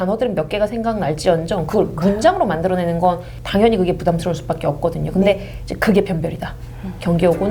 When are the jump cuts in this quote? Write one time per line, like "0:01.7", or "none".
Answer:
none